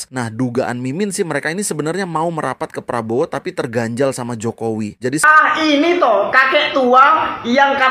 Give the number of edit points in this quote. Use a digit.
1